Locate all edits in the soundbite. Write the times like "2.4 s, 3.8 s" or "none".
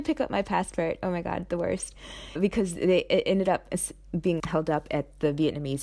none